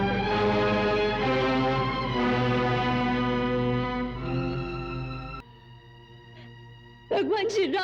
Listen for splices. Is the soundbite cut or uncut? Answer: cut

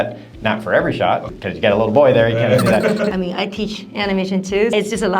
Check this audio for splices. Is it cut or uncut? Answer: cut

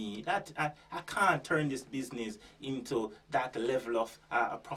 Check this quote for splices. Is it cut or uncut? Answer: uncut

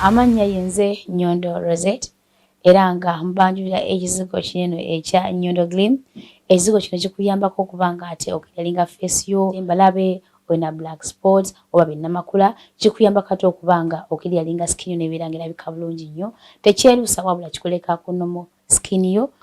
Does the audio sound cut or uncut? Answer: uncut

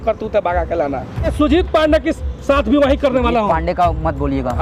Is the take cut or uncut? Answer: cut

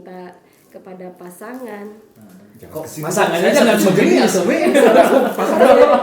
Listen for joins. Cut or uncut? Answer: uncut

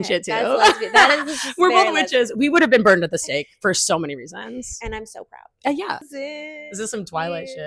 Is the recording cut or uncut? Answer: cut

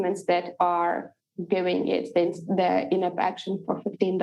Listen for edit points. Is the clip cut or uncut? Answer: uncut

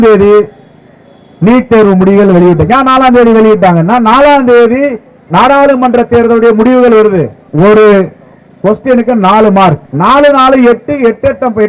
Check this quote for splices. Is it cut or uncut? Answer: cut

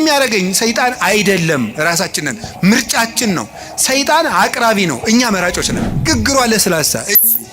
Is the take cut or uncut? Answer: cut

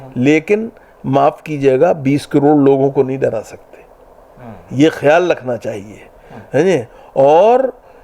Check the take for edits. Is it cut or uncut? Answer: uncut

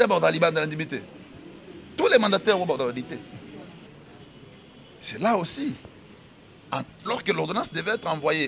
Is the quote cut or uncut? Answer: cut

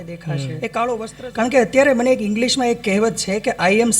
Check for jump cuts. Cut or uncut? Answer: cut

